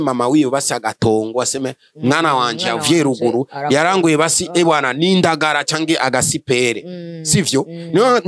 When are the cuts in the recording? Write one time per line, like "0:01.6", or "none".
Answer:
none